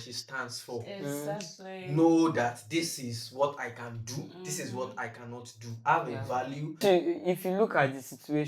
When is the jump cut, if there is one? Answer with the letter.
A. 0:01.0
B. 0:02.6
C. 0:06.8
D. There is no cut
C